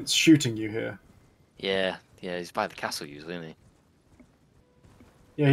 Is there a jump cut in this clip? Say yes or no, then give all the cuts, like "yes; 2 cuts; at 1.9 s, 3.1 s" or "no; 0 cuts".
yes; 1 cut; at 4.6 s